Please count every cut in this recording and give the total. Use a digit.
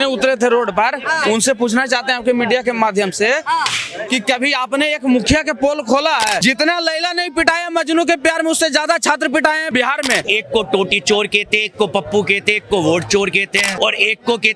3